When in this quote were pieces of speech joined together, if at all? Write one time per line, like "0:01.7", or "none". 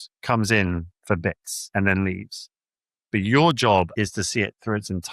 0:01.5
0:03.9